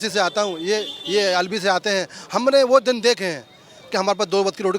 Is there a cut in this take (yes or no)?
no